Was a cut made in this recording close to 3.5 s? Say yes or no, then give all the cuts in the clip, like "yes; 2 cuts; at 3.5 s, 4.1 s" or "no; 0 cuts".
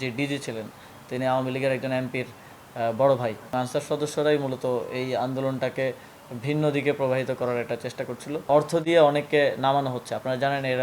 yes; 2 cuts; at 3.5 s, 8.5 s